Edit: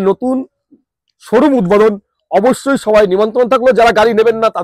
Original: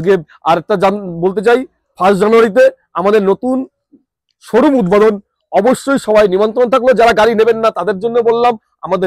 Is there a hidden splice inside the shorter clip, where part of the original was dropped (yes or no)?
no